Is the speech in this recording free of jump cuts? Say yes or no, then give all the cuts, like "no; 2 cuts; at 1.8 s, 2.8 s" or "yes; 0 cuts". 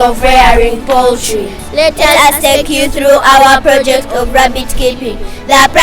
no; 1 cut; at 1.6 s